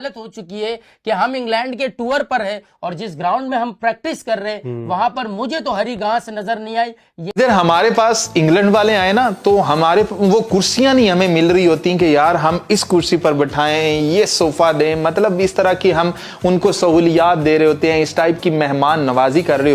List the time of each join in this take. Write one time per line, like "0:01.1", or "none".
0:07.3